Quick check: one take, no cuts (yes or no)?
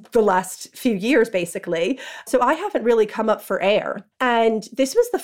no